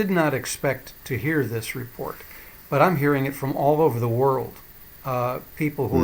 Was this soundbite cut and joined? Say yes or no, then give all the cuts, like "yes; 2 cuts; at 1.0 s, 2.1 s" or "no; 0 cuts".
no; 0 cuts